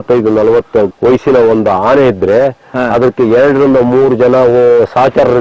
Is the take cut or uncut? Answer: uncut